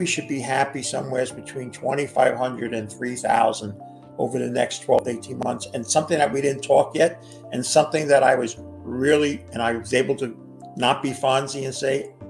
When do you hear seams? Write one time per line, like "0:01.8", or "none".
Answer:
none